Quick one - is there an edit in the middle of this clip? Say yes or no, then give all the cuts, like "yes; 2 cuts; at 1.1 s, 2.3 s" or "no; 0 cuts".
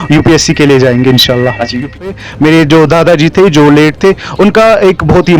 yes; 1 cut; at 2.0 s